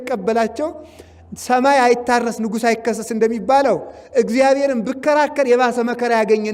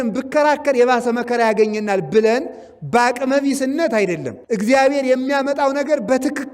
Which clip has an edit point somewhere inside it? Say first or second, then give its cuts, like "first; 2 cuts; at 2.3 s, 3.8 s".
second; 1 cut; at 4.3 s